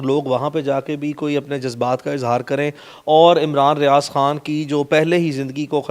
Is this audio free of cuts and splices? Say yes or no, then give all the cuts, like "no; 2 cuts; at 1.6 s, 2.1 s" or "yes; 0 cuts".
yes; 0 cuts